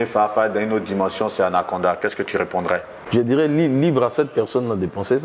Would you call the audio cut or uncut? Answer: cut